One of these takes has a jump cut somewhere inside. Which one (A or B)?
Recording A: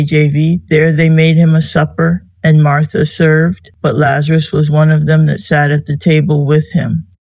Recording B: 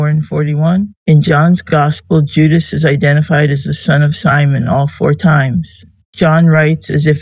A